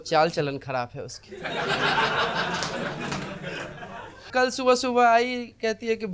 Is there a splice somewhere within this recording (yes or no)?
yes